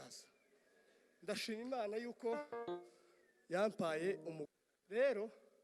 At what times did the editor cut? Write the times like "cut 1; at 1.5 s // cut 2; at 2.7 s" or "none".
cut 1; at 4.4 s